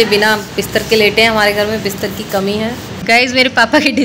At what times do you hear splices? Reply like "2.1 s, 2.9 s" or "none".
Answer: 2.9 s